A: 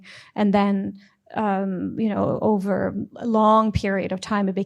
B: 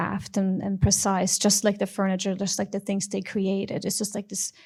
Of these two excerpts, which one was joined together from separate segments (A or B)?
A